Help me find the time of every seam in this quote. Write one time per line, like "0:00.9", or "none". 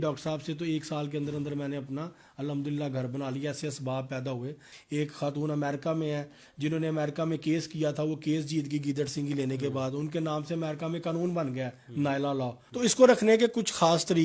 0:04.7
0:12.6